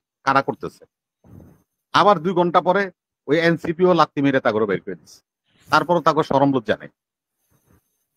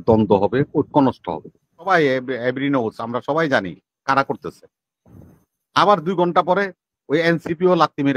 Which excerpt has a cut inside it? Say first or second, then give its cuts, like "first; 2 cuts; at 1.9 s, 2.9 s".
second; 1 cut; at 1.9 s